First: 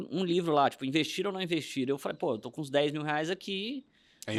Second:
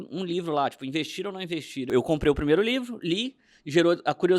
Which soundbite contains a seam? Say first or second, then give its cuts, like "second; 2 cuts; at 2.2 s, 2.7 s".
second; 1 cut; at 1.9 s